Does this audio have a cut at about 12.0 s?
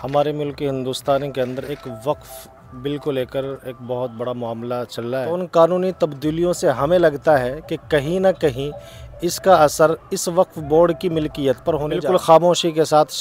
yes; 2 cuts; at 5.3 s, 12.0 s

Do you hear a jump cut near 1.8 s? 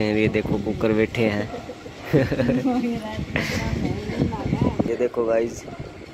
no; 1 cut; at 4.9 s

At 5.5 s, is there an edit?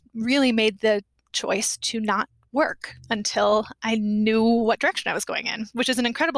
no; 0 cuts

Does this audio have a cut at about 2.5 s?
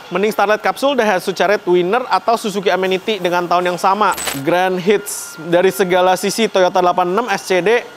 no; 1 cut; at 4.2 s

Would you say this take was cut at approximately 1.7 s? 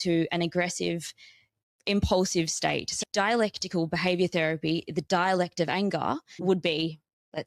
yes; 3 cuts; at 1.7 s, 2.9 s, 6.4 s

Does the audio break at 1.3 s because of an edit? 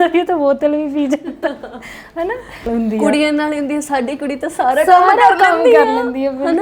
no; 1 cut; at 2.7 s

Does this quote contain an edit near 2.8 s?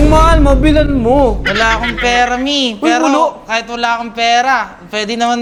no; 0 cuts

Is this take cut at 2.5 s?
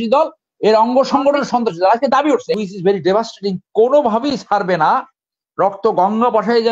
yes; 1 cut; at 2.5 s

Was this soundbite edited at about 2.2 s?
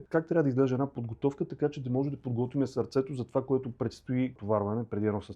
no; 1 cut; at 4.4 s

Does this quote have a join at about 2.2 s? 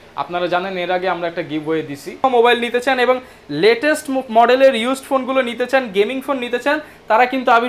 yes; 1 cut; at 2.2 s

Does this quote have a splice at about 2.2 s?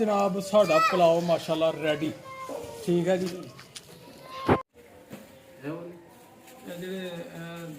no; 1 cut; at 4.7 s

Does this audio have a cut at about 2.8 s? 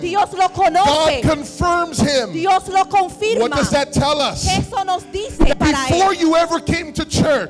no; 1 cut; at 5.5 s

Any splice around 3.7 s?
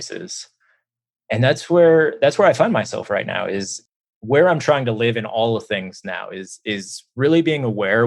yes; 1 cut; at 3.7 s

